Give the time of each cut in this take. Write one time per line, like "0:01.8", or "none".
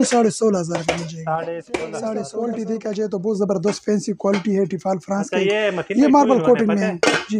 0:02.3